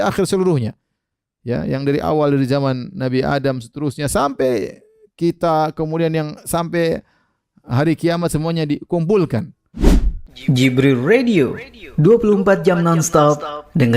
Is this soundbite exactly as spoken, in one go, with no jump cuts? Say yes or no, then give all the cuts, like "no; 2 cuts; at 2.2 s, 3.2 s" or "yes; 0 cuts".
no; 1 cut; at 9.6 s